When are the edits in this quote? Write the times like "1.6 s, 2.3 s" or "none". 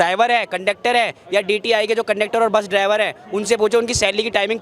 none